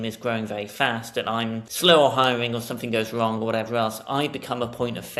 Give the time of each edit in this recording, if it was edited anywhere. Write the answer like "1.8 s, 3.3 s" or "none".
1.7 s